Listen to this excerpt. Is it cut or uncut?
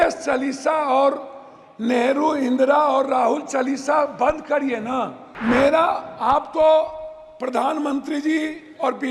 cut